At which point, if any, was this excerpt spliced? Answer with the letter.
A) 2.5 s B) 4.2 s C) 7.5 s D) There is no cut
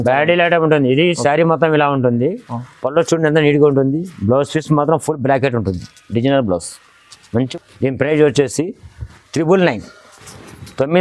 C